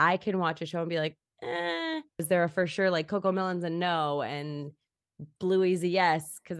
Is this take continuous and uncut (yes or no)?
no